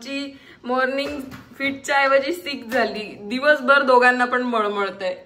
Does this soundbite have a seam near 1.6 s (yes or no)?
no